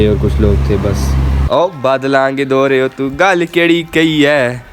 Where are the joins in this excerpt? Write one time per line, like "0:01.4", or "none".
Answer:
0:01.3